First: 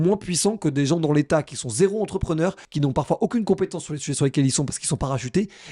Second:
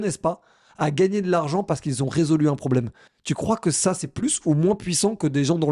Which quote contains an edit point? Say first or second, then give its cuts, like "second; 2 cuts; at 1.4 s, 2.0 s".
first; 1 cut; at 2.7 s